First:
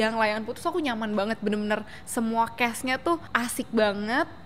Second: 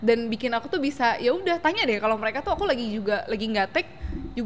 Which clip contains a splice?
first; 1 cut; at 3.3 s

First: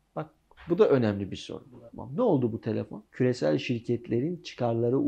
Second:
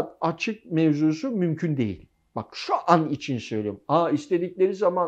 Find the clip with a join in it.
first; 2 cuts; at 1.7 s, 3.0 s

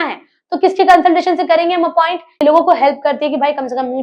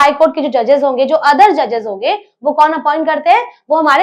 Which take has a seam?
first; 1 cut; at 2.3 s

